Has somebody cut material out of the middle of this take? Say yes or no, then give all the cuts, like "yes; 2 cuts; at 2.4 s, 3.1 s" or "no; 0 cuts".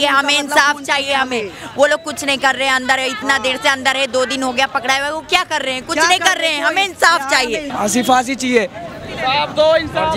yes; 1 cut; at 7.7 s